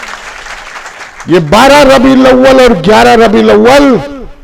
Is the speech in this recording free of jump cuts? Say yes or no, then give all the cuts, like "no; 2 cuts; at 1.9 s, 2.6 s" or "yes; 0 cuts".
no; 1 cut; at 1.1 s